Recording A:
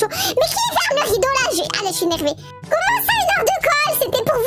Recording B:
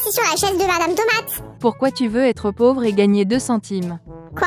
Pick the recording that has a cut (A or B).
B